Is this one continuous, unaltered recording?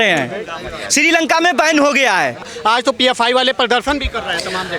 no; 1 cut; at 2.5 s

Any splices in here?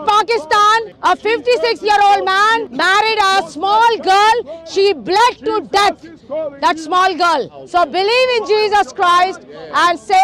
yes; 3 cuts; at 0.9 s, 2.7 s, 7.6 s

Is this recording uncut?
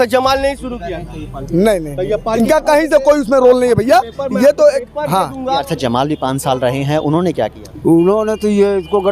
no; 1 cut; at 5.6 s

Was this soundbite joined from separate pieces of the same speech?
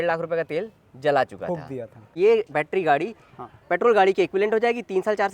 yes; 1 cut; at 2.2 s

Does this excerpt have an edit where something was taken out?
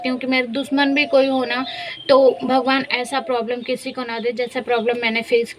no; 0 cuts

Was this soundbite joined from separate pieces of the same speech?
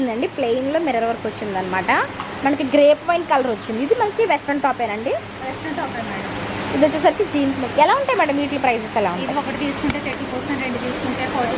no; 0 cuts

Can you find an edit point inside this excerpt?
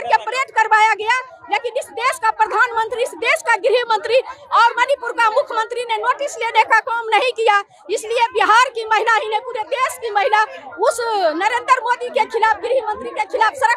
no; 0 cuts

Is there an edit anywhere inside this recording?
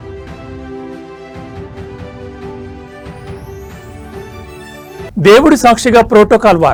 no; 0 cuts

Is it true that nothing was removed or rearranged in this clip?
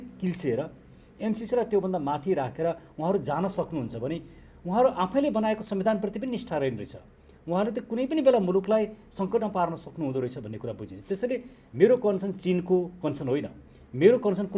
yes; 0 cuts

